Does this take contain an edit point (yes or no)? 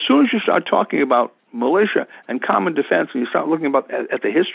no